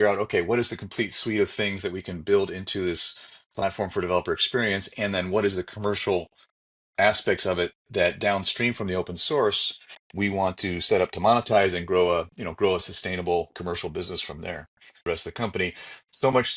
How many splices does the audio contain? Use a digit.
1